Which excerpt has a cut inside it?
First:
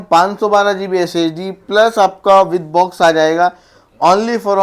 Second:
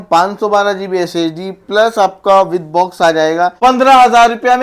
second; 1 cut; at 3.5 s

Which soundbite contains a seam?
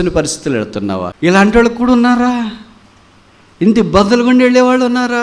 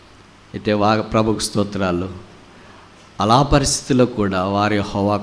first; 1 cut; at 1.1 s

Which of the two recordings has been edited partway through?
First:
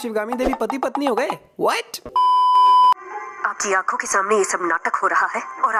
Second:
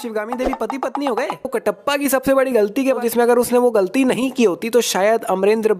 second; 2 cuts; at 1.5 s, 3.0 s

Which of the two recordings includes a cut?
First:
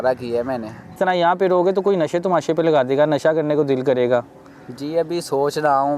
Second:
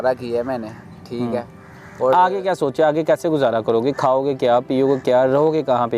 first; 1 cut; at 0.9 s

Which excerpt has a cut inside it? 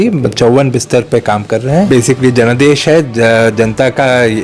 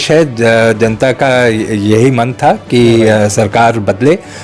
first; 1 cut; at 1.9 s

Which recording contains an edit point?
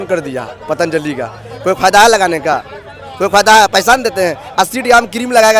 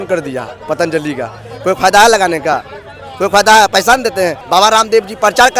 second; 1 cut; at 4.4 s

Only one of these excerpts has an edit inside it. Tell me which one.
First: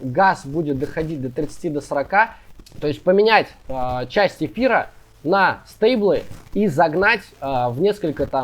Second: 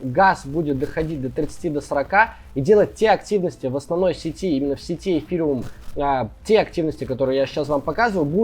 first; 1 cut; at 2.5 s

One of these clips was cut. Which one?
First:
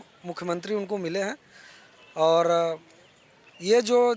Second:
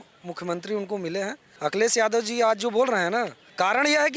second; 1 cut; at 1.4 s

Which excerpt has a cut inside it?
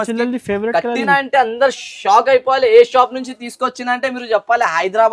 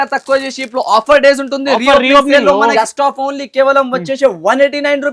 second; 1 cut; at 2.7 s

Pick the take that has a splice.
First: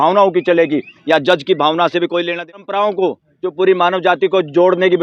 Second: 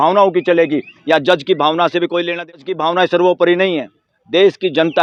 first; 1 cut; at 2.5 s

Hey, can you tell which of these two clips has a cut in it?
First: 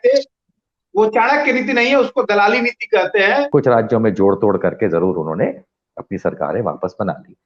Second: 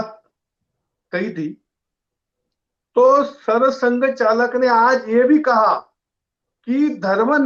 first; 1 cut; at 3.5 s

